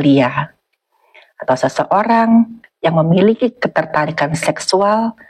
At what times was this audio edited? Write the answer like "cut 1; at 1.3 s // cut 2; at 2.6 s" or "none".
none